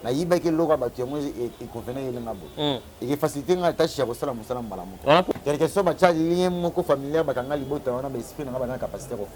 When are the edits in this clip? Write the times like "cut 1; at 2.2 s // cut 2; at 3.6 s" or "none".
cut 1; at 5.4 s